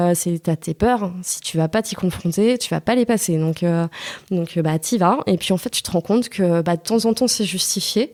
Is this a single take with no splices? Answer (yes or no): yes